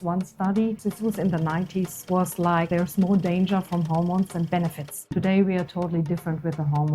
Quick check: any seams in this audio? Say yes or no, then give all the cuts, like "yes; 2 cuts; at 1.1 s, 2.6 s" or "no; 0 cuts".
yes; 4 cuts; at 0.8 s, 2.0 s, 2.7 s, 5.1 s